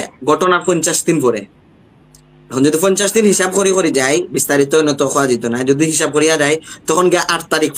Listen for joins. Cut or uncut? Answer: uncut